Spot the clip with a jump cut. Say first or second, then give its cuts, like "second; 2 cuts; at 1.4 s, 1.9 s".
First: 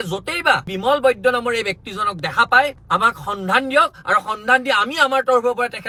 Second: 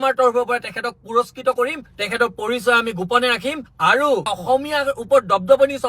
second; 2 cuts; at 1.9 s, 4.3 s